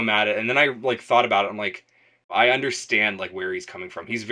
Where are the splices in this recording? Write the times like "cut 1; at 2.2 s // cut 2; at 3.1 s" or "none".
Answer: cut 1; at 2.3 s